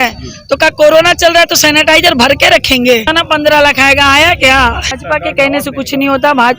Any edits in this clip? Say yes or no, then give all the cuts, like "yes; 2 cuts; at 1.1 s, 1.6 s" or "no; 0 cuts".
yes; 2 cuts; at 3.1 s, 4.9 s